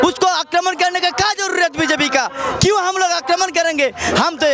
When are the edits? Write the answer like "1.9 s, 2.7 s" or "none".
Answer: none